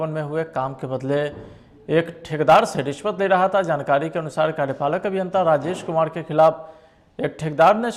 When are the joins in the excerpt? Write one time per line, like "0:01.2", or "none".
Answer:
none